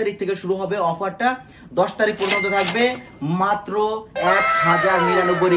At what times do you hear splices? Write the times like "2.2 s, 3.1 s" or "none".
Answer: none